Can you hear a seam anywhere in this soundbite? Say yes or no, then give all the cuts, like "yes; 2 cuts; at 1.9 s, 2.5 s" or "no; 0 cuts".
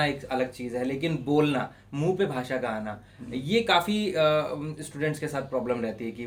no; 0 cuts